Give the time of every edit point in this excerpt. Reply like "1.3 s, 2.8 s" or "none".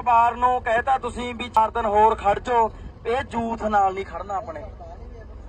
1.6 s